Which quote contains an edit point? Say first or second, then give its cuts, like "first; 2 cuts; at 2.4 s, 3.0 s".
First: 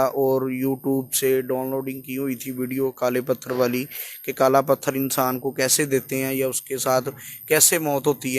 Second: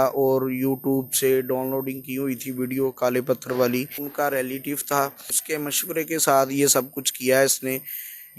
second; 2 cuts; at 4.0 s, 5.3 s